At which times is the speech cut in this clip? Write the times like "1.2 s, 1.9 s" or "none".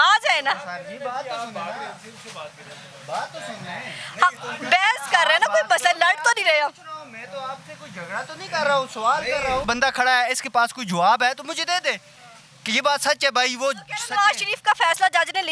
9.6 s